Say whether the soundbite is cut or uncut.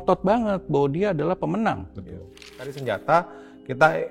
cut